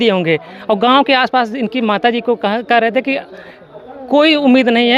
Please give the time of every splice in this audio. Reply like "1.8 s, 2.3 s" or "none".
none

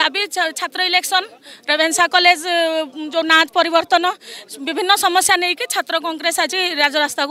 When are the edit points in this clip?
none

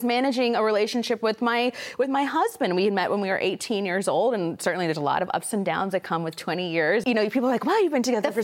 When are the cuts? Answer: 7.0 s

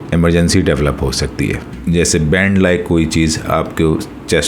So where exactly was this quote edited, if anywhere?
1.7 s

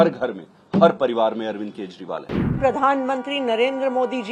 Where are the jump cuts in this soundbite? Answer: 2.4 s

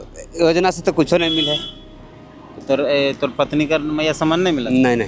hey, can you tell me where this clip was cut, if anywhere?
none

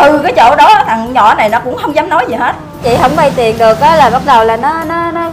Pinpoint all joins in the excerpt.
2.8 s

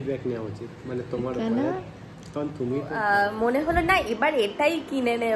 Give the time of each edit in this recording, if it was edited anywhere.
2.9 s

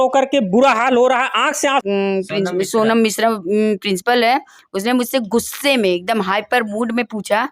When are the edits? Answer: 1.8 s

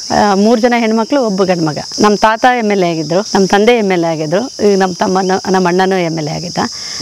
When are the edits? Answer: 1.9 s, 3.3 s

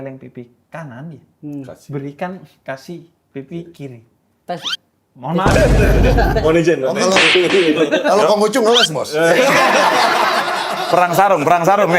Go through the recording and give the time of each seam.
none

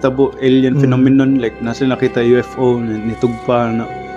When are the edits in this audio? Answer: none

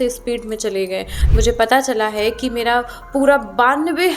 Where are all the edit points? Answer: 1.2 s

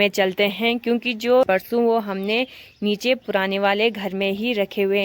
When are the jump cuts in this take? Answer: 1.5 s

